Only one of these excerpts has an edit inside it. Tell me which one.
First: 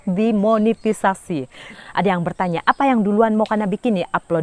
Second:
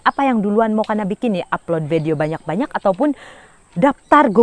first; 1 cut; at 1.7 s

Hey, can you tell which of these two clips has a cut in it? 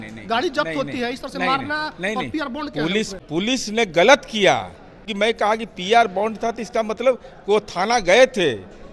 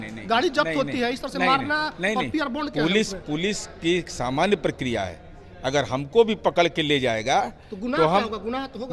first; 2 cuts; at 3.2 s, 5.0 s

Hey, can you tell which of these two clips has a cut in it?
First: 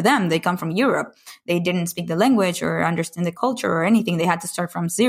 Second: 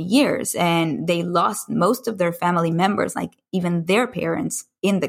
first; 1 cut; at 3.3 s

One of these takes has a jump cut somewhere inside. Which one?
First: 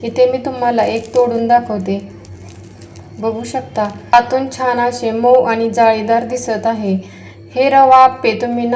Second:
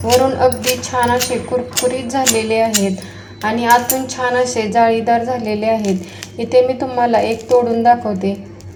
first; 1 cut; at 4.1 s

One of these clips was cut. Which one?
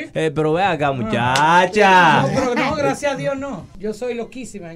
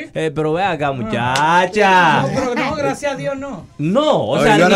first; 1 cut; at 3.6 s

